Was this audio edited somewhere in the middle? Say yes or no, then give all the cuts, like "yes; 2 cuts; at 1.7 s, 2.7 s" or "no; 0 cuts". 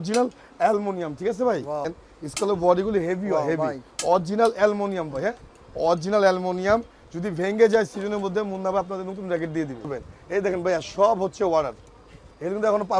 yes; 2 cuts; at 2.0 s, 9.9 s